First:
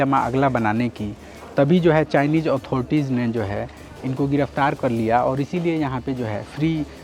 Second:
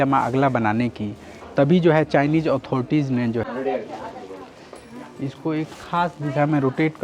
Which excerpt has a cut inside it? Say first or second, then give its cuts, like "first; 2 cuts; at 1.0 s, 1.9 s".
second; 1 cut; at 3.5 s